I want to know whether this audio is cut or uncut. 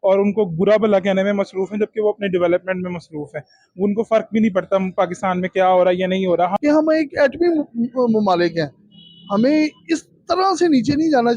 cut